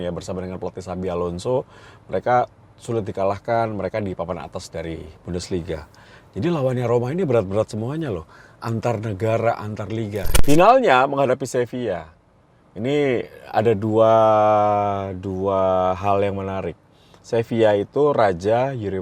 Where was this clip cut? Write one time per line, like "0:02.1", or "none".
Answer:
0:10.3